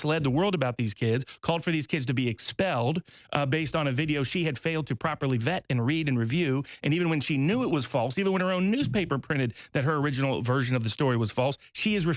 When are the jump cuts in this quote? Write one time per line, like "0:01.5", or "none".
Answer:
none